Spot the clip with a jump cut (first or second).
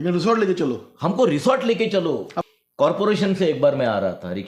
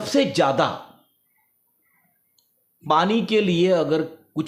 first